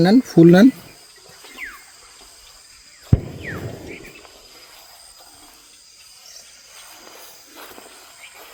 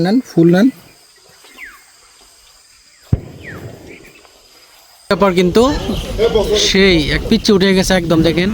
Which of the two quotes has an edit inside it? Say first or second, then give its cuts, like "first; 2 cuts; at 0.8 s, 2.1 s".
second; 1 cut; at 5.1 s